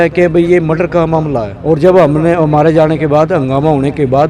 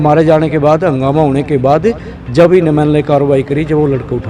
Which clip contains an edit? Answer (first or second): first